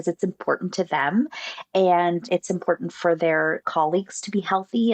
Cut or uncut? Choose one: cut